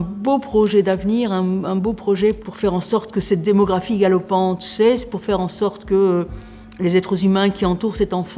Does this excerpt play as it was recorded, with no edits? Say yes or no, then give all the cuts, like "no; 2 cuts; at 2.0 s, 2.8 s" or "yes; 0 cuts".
yes; 0 cuts